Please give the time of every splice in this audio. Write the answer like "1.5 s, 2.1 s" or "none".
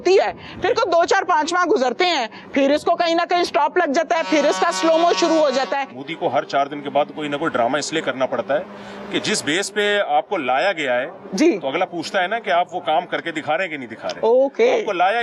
6.0 s